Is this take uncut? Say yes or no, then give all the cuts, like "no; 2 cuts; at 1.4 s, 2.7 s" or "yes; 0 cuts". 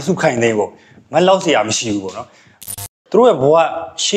no; 1 cut; at 2.7 s